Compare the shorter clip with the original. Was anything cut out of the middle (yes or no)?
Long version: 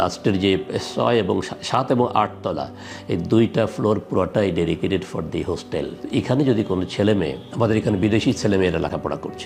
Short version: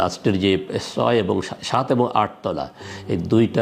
no